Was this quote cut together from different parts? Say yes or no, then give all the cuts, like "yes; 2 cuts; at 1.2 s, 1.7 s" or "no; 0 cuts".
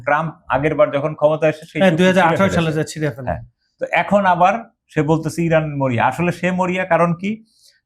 no; 0 cuts